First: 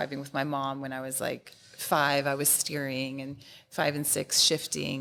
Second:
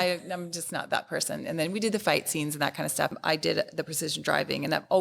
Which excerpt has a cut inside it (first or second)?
second